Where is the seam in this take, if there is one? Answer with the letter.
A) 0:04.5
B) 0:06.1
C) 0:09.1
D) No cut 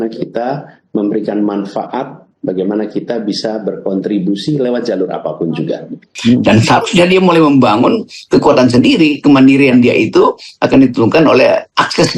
B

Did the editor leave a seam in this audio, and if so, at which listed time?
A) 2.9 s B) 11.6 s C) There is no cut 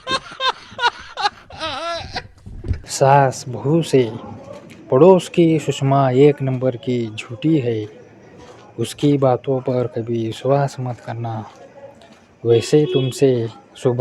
A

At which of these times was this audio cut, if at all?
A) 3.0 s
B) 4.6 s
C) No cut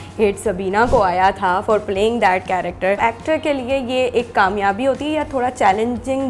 A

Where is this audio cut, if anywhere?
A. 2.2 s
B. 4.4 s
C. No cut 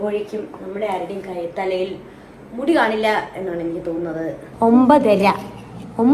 B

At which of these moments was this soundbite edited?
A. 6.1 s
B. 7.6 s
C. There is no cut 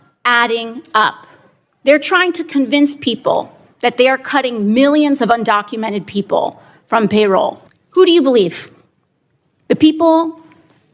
B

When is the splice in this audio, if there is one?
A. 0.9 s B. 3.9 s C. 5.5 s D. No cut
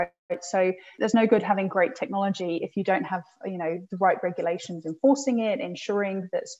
A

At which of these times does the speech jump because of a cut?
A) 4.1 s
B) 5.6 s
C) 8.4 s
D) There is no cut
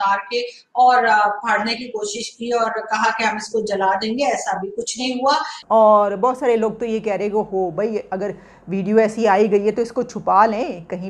B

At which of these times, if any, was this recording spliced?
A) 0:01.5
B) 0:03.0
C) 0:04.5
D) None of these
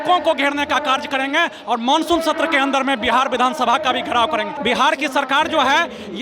C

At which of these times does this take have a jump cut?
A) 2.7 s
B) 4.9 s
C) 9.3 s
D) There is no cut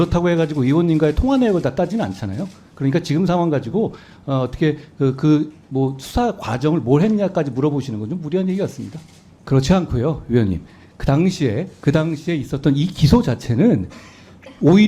C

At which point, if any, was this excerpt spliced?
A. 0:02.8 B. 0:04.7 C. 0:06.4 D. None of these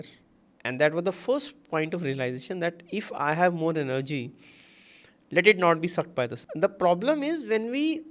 C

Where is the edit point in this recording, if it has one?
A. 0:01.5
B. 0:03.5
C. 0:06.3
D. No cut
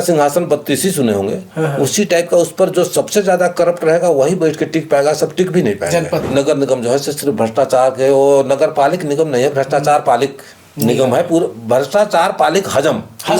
C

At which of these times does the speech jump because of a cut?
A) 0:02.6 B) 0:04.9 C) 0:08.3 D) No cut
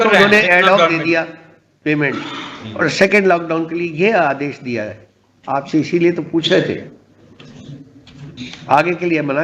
C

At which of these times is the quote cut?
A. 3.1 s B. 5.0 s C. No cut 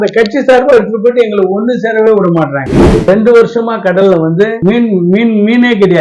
A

